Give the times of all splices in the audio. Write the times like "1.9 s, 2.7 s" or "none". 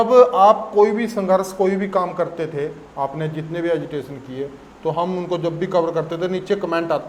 none